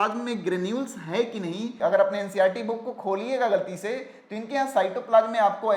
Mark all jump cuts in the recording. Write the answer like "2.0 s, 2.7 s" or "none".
1.7 s